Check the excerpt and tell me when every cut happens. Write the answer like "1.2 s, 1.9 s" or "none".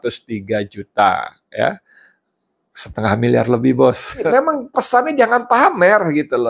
4.2 s